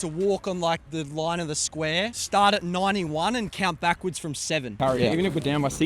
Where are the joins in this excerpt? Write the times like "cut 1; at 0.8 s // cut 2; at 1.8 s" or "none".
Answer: cut 1; at 4.7 s